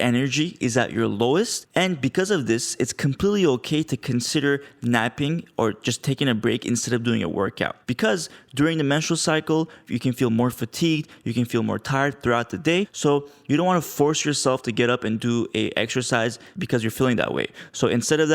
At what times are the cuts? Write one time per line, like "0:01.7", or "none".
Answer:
0:01.6
0:07.8
0:12.9
0:16.5